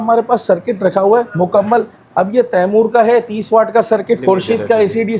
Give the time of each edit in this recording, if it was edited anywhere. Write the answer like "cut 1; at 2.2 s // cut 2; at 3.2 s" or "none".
cut 1; at 1.3 s // cut 2; at 4.2 s